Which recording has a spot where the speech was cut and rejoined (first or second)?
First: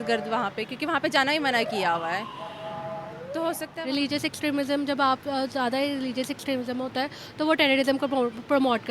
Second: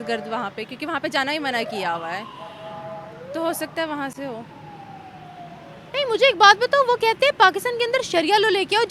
first